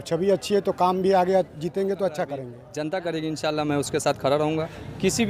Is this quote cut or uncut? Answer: cut